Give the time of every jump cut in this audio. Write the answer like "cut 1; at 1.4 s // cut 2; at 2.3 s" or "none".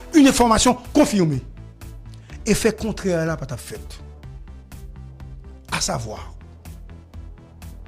cut 1; at 4.0 s // cut 2; at 5.6 s

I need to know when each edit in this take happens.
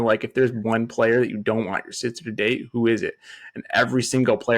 none

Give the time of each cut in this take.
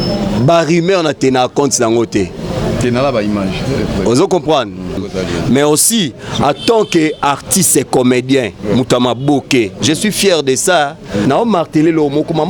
cut 1; at 5.0 s // cut 2; at 11.2 s

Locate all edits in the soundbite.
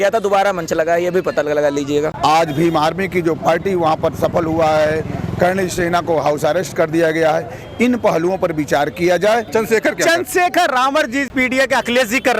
cut 1; at 2.1 s // cut 2; at 9.5 s // cut 3; at 11.3 s

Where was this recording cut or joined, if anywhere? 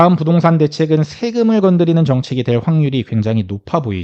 none

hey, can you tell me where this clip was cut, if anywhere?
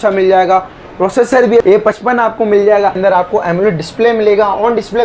cut 1; at 1.6 s // cut 2; at 3.0 s

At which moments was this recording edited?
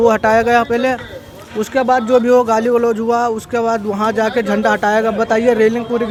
none

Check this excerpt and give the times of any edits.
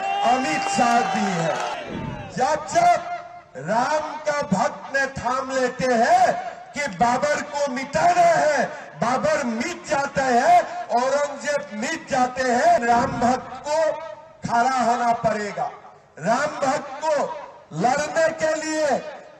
cut 1; at 1.8 s // cut 2; at 12.8 s

